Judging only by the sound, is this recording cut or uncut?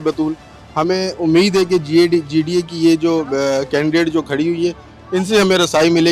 uncut